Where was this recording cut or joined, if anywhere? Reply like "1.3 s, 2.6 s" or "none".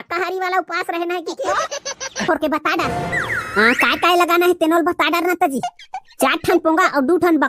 2.2 s